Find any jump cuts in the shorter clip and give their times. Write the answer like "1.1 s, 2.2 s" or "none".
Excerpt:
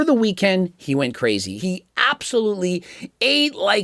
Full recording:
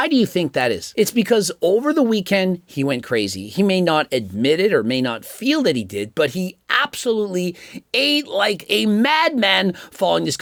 1.6 s

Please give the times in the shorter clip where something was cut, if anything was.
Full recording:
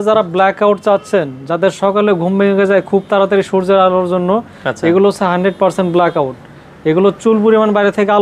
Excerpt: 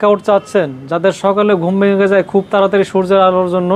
none

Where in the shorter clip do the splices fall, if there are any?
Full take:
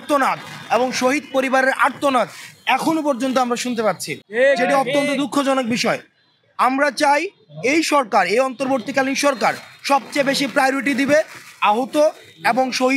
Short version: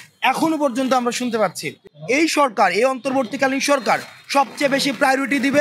1.8 s

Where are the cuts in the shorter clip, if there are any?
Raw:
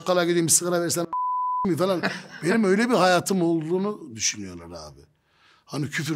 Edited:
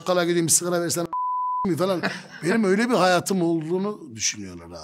none

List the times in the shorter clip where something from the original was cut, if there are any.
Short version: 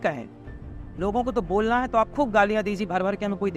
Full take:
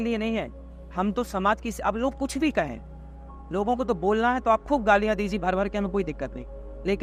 none

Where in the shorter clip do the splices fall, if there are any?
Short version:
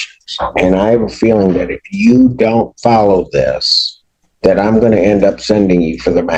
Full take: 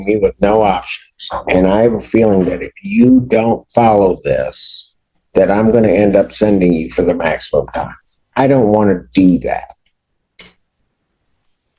none

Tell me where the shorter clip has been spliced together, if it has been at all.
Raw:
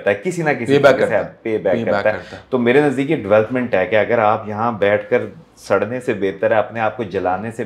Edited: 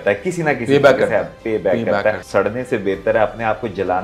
2.2 s

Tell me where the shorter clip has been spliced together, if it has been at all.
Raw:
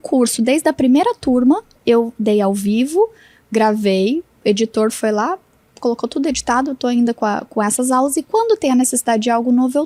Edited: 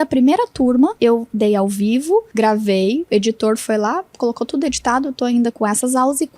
0.9 s, 2.3 s, 3.0 s, 4.1 s, 5.5 s

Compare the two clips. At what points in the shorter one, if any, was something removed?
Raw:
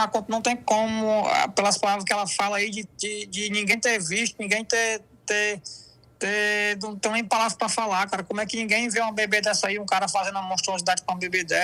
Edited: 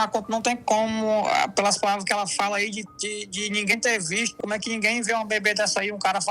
4.4 s

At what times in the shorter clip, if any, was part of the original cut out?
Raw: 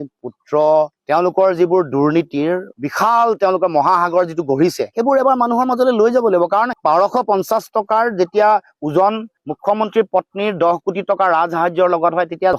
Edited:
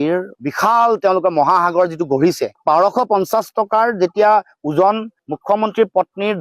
2.5 s

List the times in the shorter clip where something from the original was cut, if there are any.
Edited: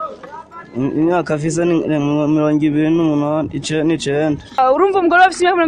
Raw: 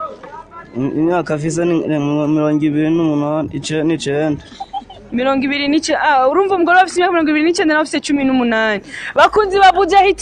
4.6 s

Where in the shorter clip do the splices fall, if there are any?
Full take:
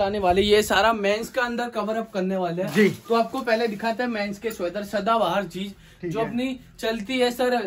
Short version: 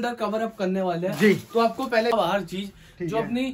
2.1 s

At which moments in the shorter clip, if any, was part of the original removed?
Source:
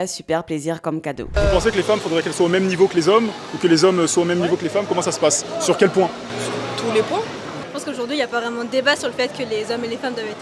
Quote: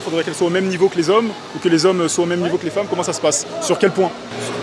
none

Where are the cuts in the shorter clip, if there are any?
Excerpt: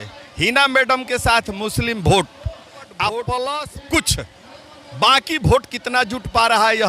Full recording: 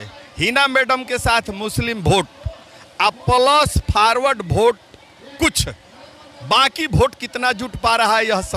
3.7 s

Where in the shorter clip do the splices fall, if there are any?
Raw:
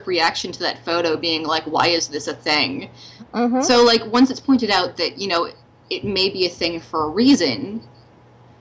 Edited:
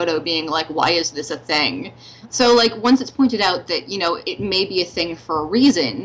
2.4 s, 4.3 s

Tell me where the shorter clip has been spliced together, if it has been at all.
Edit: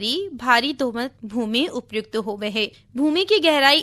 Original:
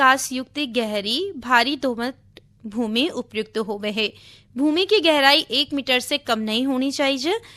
1.2 s, 2.8 s

